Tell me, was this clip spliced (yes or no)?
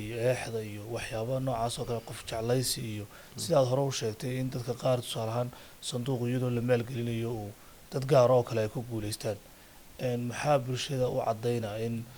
no